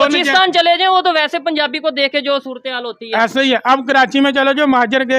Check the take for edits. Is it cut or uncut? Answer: uncut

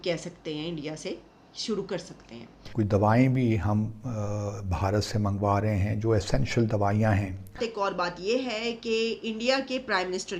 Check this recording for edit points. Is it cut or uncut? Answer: cut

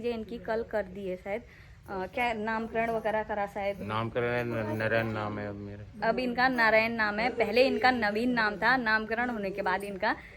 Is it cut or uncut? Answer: uncut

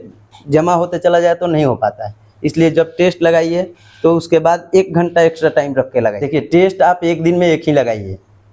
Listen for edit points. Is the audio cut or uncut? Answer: cut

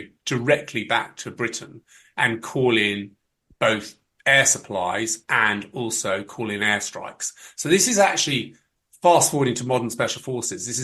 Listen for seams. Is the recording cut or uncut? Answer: uncut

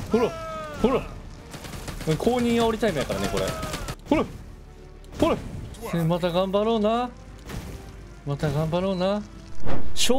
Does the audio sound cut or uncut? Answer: uncut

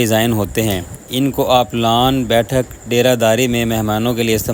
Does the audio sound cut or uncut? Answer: uncut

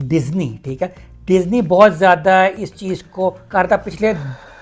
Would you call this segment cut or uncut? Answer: uncut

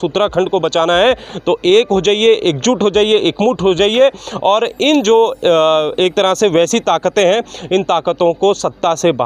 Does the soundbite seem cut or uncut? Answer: uncut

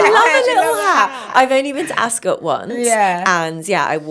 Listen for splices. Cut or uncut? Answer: uncut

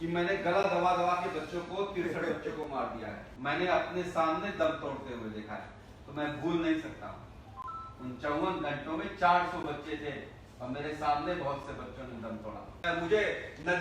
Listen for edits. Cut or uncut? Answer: cut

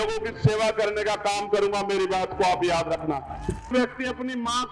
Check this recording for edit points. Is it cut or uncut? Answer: cut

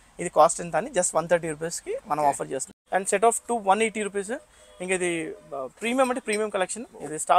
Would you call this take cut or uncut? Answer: cut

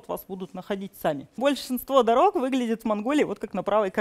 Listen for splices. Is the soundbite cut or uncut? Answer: cut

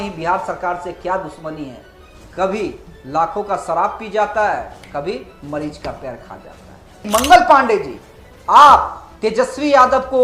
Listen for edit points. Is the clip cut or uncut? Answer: cut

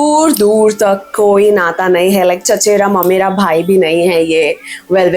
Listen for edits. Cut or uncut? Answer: uncut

